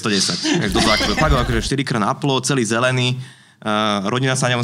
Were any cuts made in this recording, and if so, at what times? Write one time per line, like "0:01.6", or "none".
0:01.2